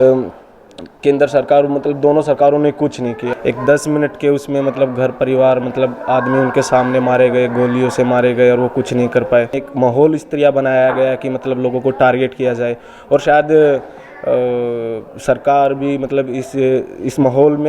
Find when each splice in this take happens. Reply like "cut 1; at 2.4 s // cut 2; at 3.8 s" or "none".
cut 1; at 3.3 s // cut 2; at 9.6 s